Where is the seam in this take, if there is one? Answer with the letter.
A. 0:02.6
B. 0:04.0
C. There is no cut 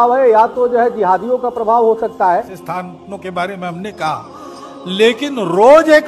A